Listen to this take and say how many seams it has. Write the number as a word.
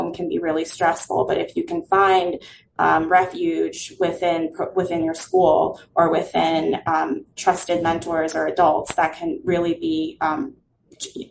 zero